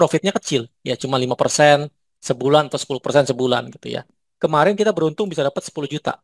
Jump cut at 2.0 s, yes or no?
no